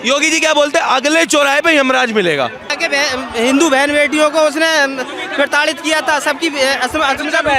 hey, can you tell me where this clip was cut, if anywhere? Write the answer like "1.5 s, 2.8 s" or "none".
2.7 s